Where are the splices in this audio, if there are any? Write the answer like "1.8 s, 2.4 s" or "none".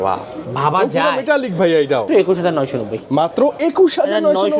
2.1 s